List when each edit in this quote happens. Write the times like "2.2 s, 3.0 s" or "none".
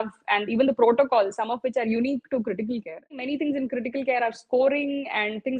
3.2 s